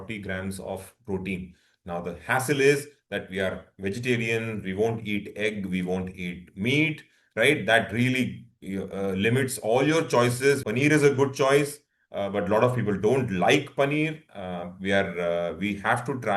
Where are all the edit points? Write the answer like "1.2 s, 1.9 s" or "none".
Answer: 10.6 s